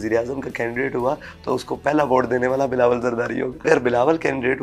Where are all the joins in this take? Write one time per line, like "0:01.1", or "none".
0:03.6